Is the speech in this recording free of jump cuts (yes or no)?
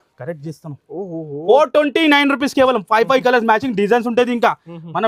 yes